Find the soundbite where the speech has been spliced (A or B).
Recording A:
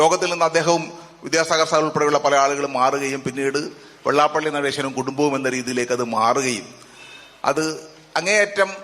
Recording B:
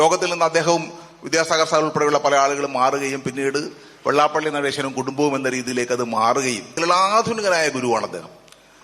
B